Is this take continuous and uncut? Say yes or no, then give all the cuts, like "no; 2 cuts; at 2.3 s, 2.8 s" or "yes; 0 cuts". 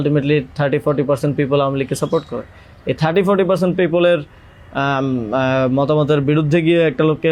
yes; 0 cuts